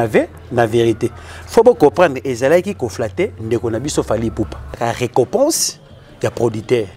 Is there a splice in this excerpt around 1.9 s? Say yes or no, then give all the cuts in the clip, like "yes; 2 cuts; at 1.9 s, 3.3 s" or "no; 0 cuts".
no; 1 cut; at 4.8 s